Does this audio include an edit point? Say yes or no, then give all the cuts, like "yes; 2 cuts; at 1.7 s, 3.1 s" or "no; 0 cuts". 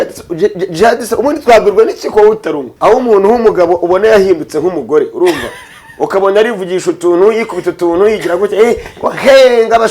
yes; 1 cut; at 2.7 s